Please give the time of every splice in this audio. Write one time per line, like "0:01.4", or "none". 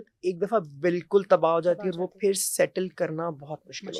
none

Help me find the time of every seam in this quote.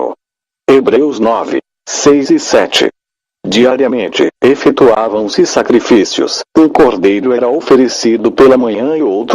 0:07.4

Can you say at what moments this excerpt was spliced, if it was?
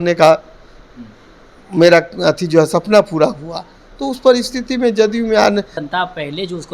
0:05.8

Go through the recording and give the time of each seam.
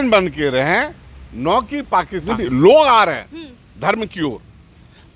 0:02.3

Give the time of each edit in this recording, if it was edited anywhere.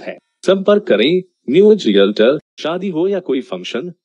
0:02.5

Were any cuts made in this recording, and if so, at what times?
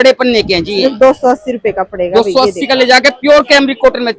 none

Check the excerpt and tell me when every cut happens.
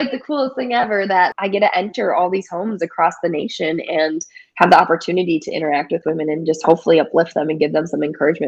0:01.3

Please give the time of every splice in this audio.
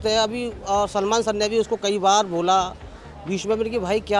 none

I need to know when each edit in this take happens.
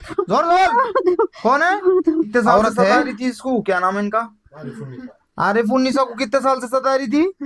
0:03.1

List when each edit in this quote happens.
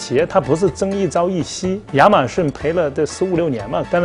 0:01.8
0:02.5

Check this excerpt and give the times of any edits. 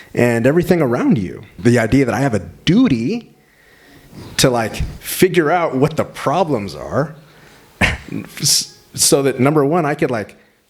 0:01.6

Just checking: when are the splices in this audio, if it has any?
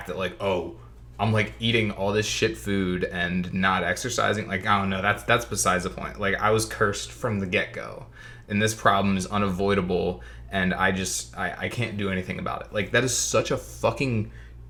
none

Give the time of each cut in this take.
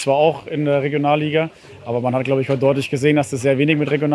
none

